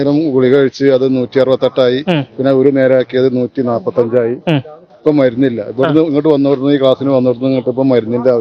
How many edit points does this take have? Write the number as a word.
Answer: zero